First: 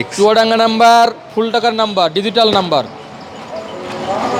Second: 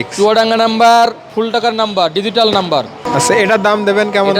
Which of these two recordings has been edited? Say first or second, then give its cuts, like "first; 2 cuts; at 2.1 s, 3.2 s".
second; 1 cut; at 3.0 s